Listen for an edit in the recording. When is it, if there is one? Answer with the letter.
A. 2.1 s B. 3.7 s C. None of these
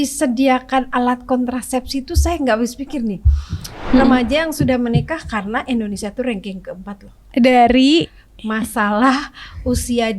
B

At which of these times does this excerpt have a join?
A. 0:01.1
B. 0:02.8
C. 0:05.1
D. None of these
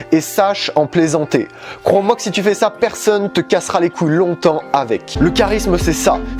C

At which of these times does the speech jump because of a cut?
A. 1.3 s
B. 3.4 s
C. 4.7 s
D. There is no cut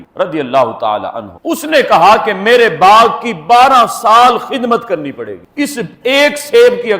A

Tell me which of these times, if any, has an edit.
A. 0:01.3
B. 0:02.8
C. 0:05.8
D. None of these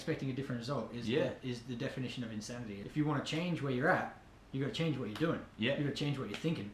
B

